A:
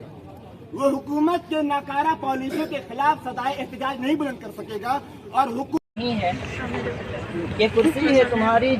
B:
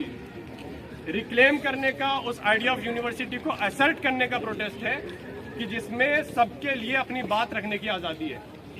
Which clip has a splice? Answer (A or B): A